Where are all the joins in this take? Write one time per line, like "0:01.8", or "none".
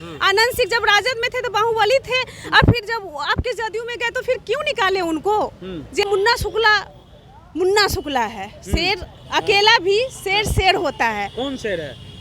0:06.0